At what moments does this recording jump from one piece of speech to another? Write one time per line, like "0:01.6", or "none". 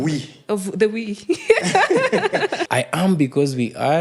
0:02.6